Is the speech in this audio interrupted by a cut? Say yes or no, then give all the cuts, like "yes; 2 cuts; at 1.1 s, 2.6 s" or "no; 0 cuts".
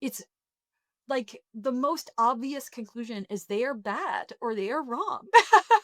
no; 0 cuts